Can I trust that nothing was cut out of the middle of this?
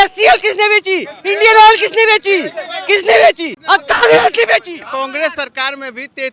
no; 2 cuts; at 3.5 s, 4.9 s

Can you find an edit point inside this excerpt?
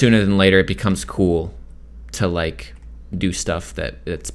no; 0 cuts

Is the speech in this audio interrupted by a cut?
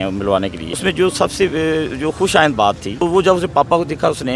yes; 2 cuts; at 0.8 s, 2.9 s

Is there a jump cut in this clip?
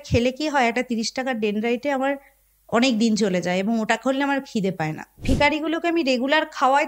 yes; 1 cut; at 5.2 s

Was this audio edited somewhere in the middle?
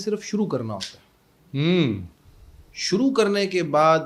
no; 0 cuts

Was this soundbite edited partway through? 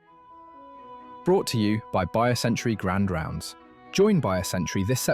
yes; 1 cut; at 1.2 s

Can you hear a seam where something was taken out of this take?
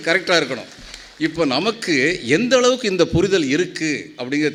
no; 0 cuts

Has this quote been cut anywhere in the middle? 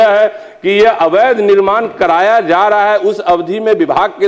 no; 0 cuts

